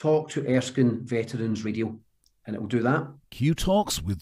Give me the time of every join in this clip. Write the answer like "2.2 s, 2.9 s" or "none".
3.2 s